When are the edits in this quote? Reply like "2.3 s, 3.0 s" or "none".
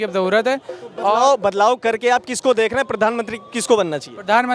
none